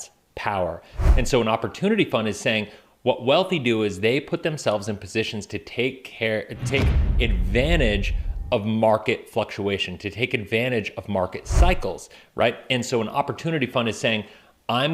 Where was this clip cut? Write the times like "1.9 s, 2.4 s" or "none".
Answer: 0.9 s

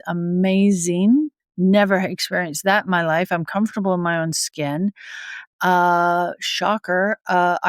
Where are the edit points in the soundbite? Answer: none

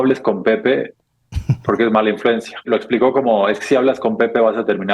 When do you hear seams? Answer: 2.7 s

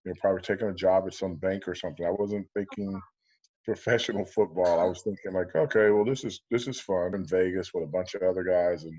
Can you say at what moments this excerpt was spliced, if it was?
7.2 s

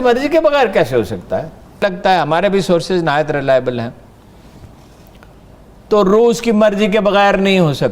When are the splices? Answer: 1.8 s

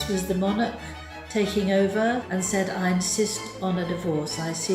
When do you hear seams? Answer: 2.2 s

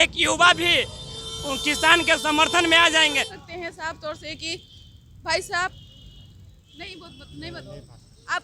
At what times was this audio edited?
3.3 s

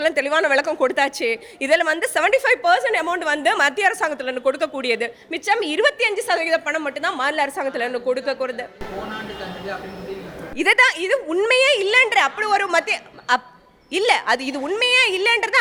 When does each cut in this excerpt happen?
none

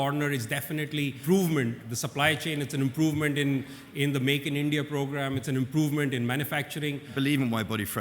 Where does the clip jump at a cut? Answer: 1.2 s, 1.9 s, 5.4 s, 7.1 s

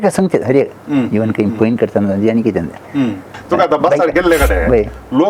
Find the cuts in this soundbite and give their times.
3.3 s

